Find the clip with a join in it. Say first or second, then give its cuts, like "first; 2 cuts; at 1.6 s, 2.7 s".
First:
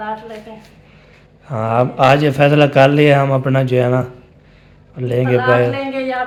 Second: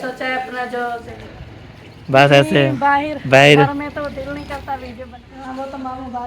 second; 2 cuts; at 1.0 s, 5.1 s